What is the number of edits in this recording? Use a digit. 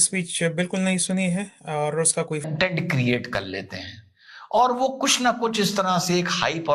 1